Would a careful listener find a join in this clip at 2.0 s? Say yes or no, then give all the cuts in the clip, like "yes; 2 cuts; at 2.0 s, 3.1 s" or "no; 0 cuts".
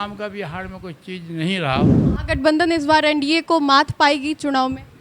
yes; 1 cut; at 2.0 s